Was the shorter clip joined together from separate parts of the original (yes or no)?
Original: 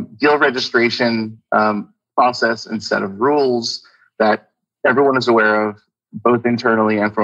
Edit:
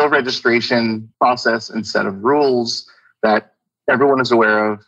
yes